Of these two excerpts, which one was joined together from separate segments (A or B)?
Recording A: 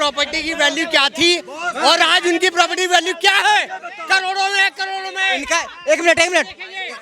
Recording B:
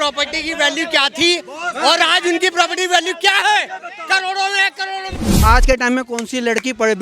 B